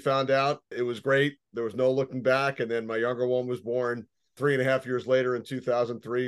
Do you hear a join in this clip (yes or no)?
yes